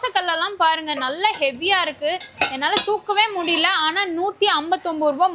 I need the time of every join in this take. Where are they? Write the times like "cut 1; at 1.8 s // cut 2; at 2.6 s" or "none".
none